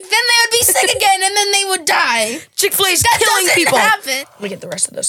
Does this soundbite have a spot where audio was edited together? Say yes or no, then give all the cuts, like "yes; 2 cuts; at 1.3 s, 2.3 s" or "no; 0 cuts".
yes; 1 cut; at 4.2 s